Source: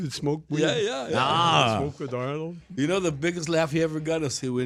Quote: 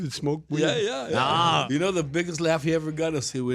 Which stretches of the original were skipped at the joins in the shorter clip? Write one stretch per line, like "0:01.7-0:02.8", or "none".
0:01.6-0:02.7